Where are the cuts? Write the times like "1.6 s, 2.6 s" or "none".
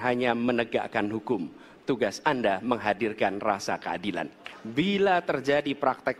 4.4 s

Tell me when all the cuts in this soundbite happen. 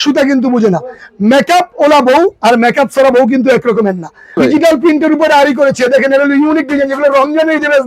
4.4 s

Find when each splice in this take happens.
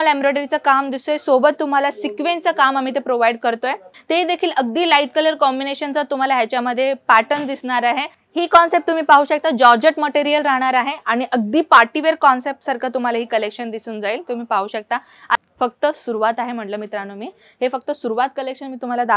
3.9 s, 8.2 s, 15.3 s

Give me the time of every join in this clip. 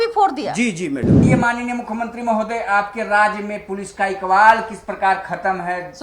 1.2 s

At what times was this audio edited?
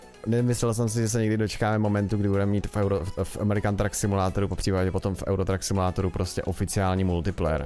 none

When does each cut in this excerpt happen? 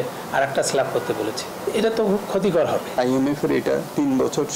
1.5 s, 3.0 s

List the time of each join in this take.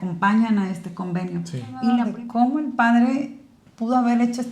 2.0 s

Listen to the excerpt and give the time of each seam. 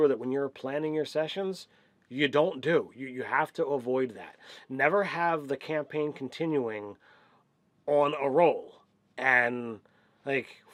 none

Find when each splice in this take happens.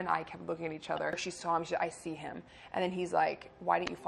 1.2 s

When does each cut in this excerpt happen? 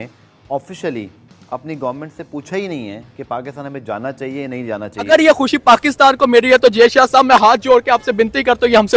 5.1 s

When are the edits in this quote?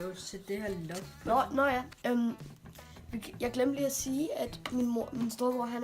4.6 s

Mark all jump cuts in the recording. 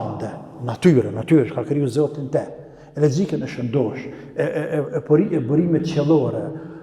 none

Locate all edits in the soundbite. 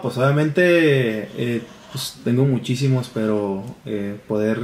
none

